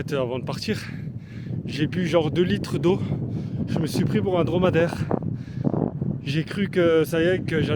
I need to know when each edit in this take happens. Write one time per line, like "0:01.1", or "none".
none